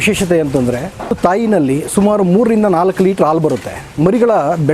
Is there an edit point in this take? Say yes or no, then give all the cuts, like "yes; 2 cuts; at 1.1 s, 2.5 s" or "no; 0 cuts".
yes; 2 cuts; at 1.1 s, 3.8 s